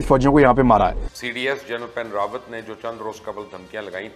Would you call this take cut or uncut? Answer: cut